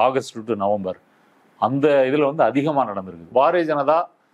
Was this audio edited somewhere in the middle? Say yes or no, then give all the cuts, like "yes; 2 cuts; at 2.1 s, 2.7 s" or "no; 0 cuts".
yes; 1 cut; at 3.2 s